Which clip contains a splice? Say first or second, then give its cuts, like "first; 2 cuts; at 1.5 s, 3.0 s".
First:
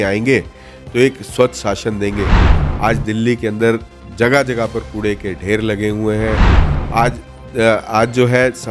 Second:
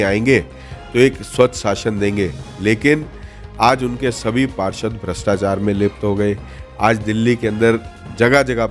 first; 1 cut; at 2.5 s